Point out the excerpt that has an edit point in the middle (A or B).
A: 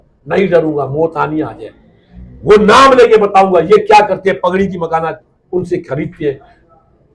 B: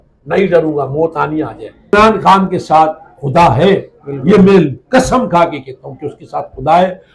B